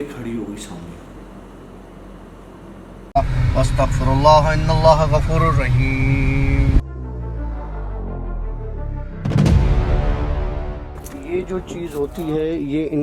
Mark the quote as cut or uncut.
cut